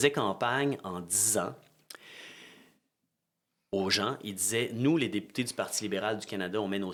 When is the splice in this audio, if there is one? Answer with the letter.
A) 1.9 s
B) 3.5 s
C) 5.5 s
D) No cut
D